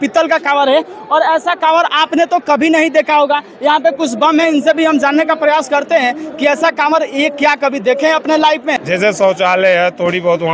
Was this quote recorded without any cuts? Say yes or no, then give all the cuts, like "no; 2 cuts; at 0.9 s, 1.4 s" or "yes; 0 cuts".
no; 1 cut; at 8.8 s